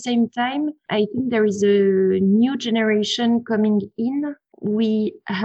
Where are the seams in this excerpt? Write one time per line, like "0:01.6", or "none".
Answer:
0:04.5